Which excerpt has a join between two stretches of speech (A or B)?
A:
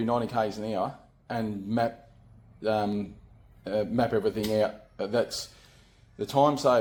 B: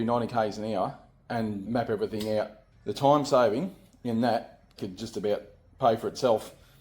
B